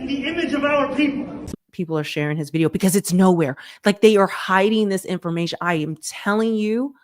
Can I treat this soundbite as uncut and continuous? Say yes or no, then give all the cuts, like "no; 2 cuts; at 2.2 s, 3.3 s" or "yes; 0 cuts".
no; 1 cut; at 1.6 s